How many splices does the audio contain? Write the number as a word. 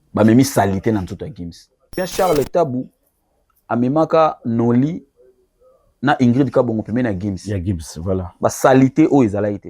one